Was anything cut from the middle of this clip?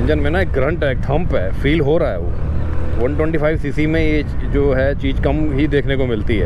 no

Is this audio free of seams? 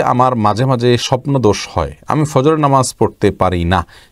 yes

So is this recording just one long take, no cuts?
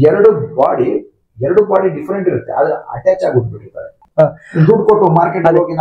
no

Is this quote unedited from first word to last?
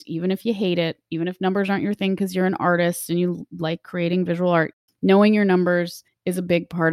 no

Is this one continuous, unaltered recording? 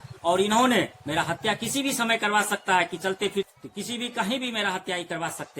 no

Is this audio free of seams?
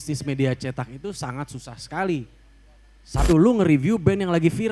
no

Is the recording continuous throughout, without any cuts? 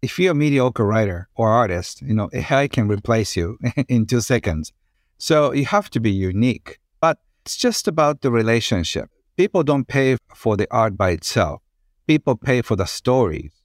no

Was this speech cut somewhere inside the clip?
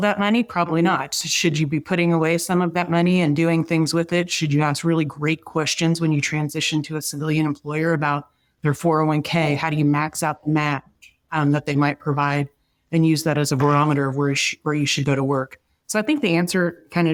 no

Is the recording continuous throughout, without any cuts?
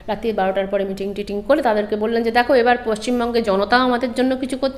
yes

